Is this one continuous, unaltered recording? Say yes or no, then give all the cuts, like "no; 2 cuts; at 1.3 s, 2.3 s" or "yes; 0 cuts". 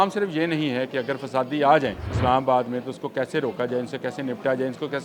no; 1 cut; at 2.1 s